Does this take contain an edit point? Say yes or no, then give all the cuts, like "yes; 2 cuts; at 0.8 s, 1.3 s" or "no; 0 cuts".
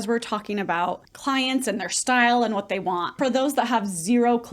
yes; 2 cuts; at 1.1 s, 3.2 s